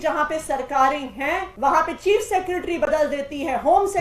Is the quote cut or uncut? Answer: cut